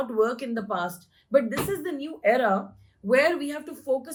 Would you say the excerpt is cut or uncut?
uncut